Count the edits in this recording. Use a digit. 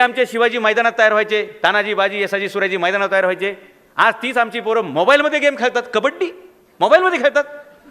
0